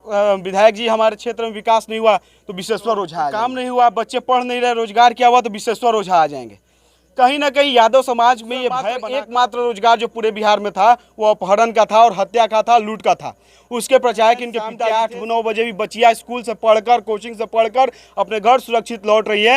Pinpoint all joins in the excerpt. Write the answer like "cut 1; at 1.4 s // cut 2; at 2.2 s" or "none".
cut 1; at 3.3 s // cut 2; at 8.9 s // cut 3; at 14.6 s